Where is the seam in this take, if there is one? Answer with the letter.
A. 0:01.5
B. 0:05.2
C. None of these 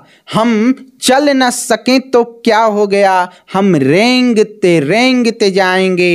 C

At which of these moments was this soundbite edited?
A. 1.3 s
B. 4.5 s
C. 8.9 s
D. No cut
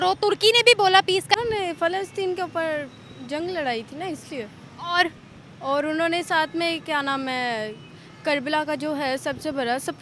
A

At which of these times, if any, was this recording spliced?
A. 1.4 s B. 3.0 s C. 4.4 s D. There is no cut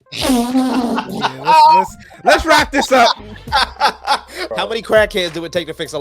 C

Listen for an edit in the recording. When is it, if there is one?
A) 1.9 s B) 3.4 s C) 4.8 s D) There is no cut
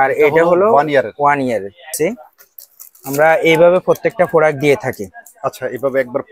A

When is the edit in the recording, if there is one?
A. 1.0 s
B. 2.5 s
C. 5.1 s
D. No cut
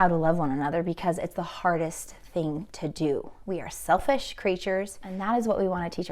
C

